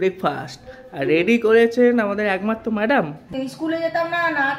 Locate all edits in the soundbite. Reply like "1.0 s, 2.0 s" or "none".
3.3 s